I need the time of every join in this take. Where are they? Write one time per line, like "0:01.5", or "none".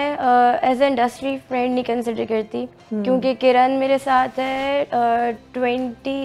none